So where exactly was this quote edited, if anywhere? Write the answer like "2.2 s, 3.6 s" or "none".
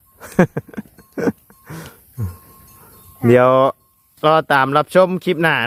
none

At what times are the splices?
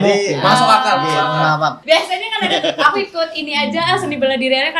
1.8 s

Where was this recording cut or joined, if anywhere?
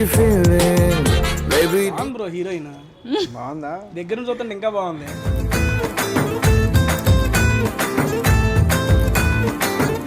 1.9 s

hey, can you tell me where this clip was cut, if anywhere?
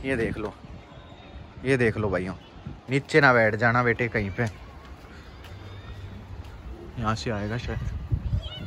none

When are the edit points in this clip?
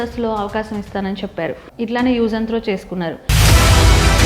1.6 s

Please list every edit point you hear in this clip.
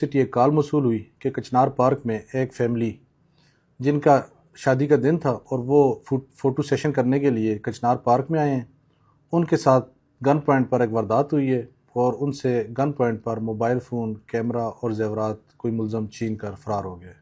none

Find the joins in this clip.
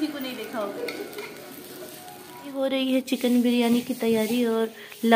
2.6 s

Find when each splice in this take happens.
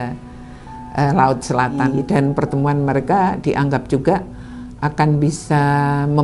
1.8 s

